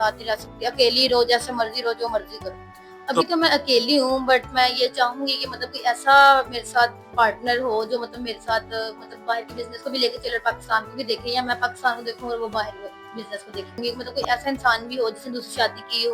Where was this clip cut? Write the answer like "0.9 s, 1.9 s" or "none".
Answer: 3.2 s, 13.8 s